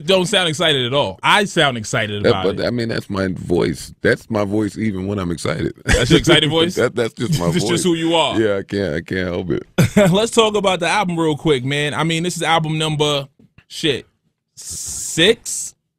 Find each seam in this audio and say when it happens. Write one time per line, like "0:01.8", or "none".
0:14.2